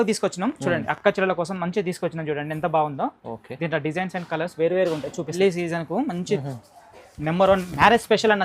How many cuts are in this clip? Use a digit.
1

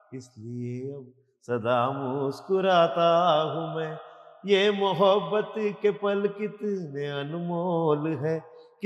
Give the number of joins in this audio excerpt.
0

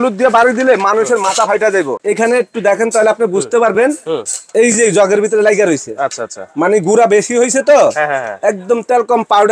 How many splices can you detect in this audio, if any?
1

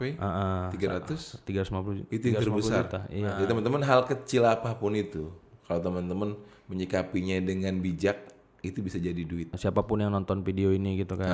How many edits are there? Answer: 2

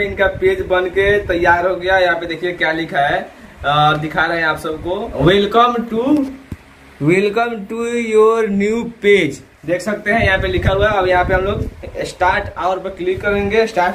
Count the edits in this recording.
0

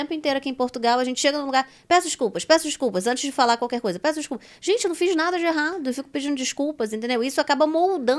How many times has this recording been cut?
0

